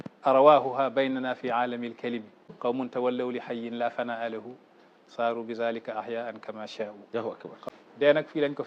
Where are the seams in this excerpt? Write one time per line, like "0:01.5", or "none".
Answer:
0:02.5
0:07.6